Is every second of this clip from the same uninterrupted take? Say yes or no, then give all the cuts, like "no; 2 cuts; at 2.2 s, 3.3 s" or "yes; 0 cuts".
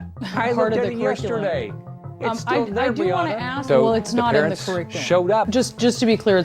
no; 1 cut; at 3.6 s